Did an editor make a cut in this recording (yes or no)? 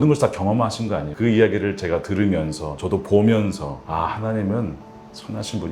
yes